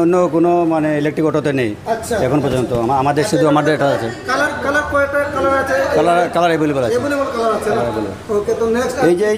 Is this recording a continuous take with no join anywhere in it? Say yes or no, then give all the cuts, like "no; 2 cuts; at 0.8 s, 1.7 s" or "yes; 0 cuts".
yes; 0 cuts